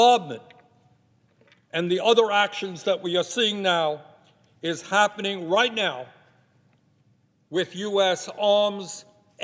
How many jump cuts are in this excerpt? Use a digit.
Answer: 0